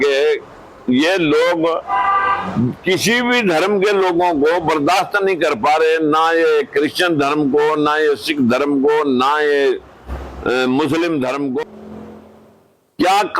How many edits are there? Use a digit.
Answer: 1